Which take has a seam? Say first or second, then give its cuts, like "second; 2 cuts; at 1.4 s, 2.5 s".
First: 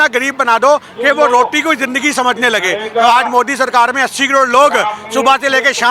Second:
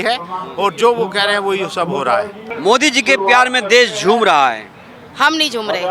second; 1 cut; at 2.5 s